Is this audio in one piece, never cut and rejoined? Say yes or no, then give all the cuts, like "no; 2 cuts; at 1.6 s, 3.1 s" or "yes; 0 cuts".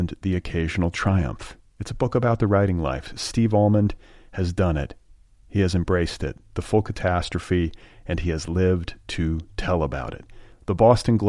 yes; 0 cuts